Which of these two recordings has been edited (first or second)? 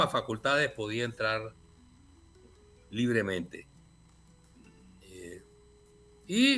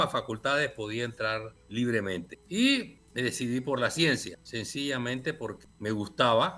second